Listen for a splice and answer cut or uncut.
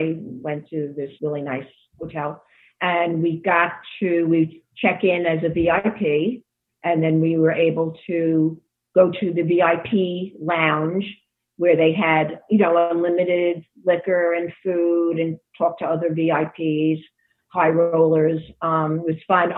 cut